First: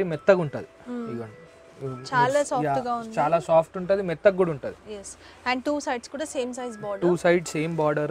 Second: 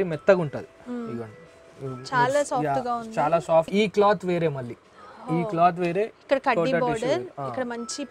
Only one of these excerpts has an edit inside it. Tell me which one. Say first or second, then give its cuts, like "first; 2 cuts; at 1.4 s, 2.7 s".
second; 1 cut; at 3.7 s